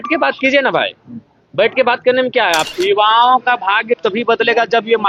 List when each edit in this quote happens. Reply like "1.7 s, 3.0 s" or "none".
2.7 s